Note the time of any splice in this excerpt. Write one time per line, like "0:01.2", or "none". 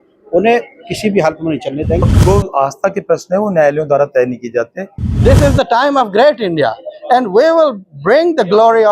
0:02.1
0:05.1